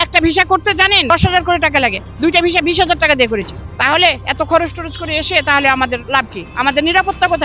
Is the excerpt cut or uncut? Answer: cut